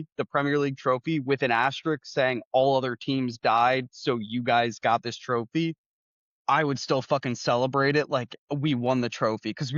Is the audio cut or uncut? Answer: uncut